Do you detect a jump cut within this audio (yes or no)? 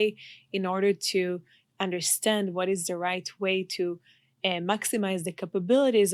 no